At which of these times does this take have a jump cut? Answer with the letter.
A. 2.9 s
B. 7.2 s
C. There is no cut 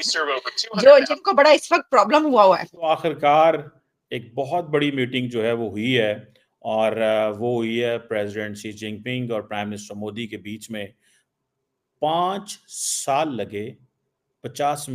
A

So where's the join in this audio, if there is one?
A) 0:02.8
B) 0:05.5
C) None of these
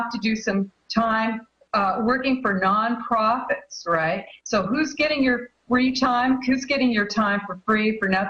B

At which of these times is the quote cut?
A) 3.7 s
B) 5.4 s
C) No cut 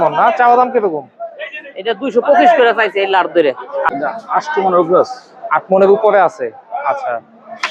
A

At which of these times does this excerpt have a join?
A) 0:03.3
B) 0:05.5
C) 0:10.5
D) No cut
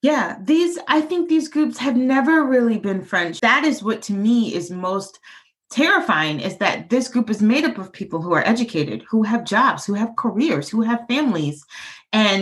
A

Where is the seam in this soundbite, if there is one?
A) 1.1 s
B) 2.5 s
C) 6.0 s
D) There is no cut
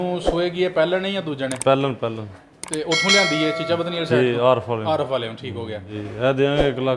C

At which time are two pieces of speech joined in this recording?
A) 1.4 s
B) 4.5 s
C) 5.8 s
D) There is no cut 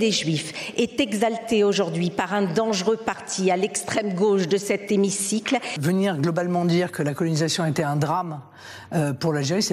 C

